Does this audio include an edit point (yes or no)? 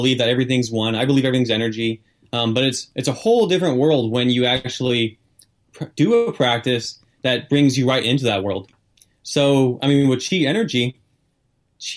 yes